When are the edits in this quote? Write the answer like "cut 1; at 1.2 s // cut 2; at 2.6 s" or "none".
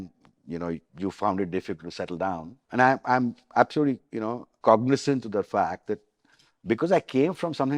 cut 1; at 0.9 s // cut 2; at 2.5 s // cut 3; at 4.5 s